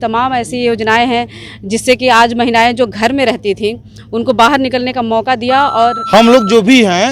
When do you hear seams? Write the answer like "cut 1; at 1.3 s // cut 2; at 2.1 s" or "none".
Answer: cut 1; at 6.0 s